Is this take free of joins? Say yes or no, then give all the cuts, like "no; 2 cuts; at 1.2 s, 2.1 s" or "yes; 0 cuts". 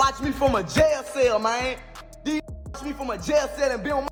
yes; 0 cuts